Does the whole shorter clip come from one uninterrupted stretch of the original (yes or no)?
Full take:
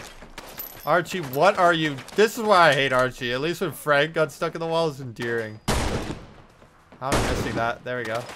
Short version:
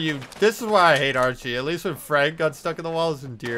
yes